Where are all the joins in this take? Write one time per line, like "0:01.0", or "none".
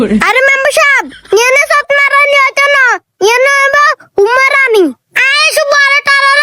none